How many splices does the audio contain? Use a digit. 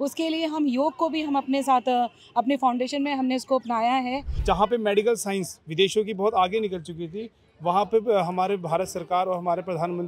1